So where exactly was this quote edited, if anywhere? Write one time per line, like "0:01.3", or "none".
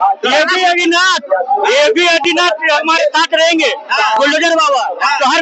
none